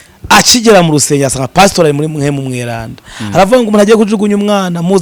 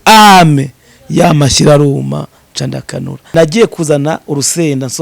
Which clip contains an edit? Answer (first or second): second